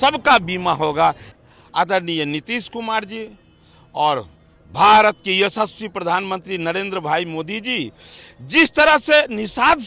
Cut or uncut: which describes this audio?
cut